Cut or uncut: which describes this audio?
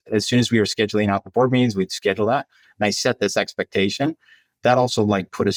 uncut